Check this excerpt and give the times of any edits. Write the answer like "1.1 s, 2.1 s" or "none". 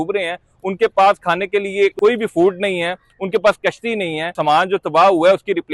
1.9 s, 4.3 s